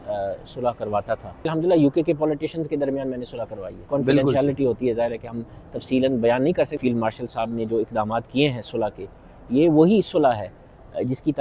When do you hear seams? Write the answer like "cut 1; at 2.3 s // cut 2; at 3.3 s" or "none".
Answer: cut 1; at 1.5 s // cut 2; at 3.8 s // cut 3; at 6.7 s